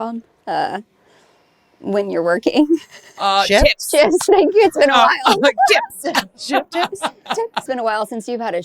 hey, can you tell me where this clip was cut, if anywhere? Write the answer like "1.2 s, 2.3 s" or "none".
7.6 s